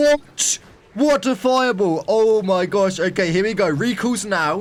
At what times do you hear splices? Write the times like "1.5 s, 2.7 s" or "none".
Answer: none

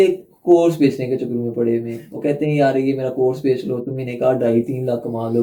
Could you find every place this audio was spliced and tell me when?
none

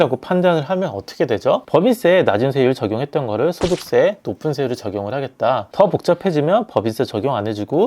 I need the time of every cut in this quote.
none

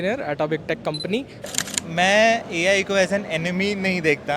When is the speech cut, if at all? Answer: 1.4 s

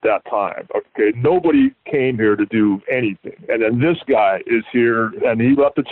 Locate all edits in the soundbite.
3.3 s, 5.2 s

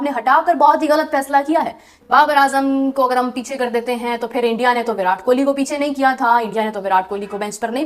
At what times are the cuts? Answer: 2.0 s

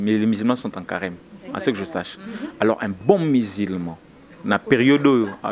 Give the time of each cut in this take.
none

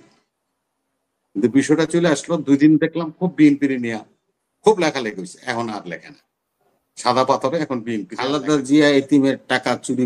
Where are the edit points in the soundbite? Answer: 8.1 s

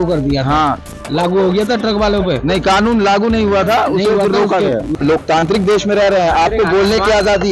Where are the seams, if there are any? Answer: 5.0 s

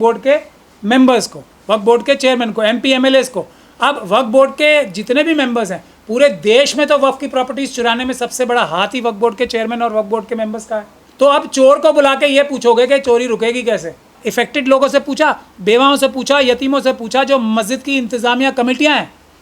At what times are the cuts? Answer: 11.0 s, 14.2 s

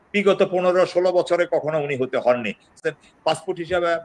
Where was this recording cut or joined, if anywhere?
2.8 s

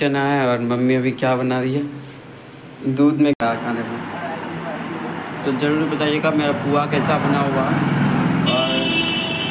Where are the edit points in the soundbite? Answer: 3.4 s

